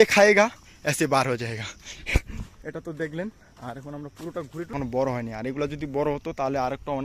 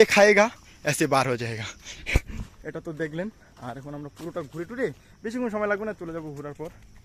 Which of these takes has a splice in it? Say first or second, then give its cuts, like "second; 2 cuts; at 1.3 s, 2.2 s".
first; 1 cut; at 4.7 s